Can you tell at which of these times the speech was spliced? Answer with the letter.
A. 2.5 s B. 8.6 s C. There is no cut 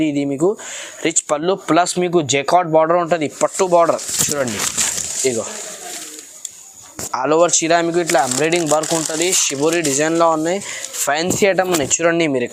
C